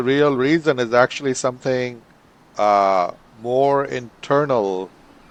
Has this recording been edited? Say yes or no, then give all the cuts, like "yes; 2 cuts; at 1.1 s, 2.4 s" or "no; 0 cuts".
no; 0 cuts